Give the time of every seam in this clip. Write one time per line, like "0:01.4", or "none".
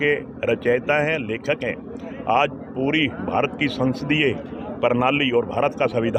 none